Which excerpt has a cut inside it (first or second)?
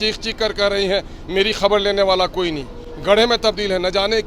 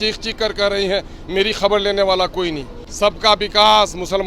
second